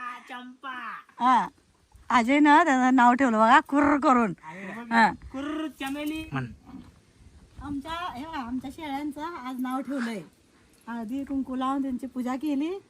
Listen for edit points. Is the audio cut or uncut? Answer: cut